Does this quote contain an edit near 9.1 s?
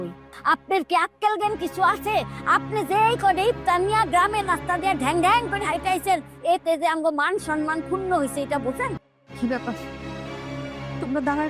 yes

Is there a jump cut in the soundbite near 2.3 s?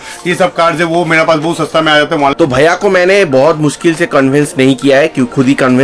yes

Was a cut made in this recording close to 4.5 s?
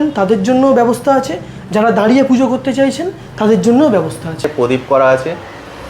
yes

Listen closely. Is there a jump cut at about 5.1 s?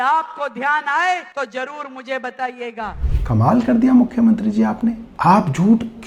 yes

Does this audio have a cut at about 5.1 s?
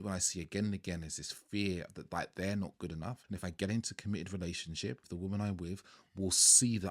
yes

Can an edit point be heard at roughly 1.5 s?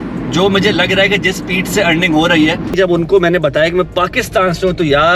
no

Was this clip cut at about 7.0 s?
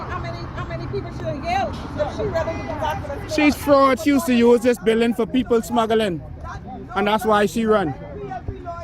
yes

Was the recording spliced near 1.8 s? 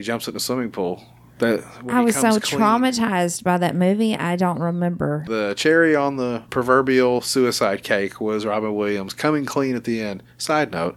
no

